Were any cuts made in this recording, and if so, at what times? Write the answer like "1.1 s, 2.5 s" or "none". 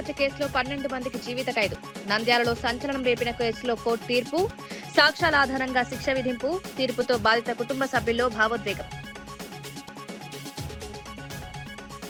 none